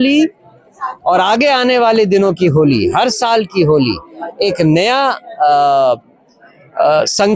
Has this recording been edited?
no; 0 cuts

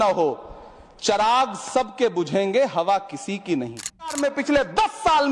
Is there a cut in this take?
yes; 1 cut; at 4.1 s

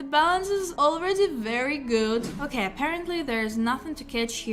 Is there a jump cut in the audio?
yes; 1 cut; at 2.3 s

